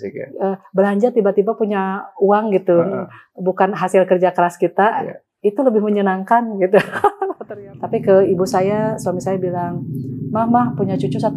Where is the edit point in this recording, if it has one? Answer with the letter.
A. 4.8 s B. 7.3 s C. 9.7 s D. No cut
B